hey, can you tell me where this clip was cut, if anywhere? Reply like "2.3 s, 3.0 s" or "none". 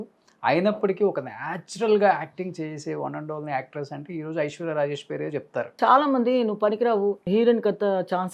5.7 s, 7.2 s